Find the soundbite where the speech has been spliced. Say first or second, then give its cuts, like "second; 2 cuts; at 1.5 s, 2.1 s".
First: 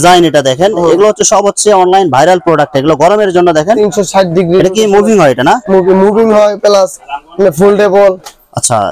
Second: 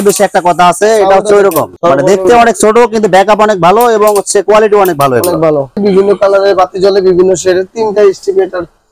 second; 1 cut; at 5.8 s